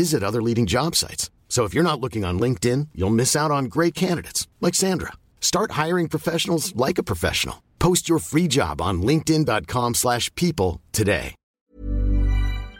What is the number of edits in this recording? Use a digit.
1